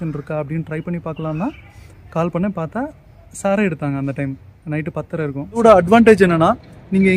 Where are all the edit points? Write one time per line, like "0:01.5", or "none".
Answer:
0:05.6